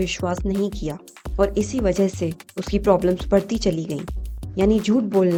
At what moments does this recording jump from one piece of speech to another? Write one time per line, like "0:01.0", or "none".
none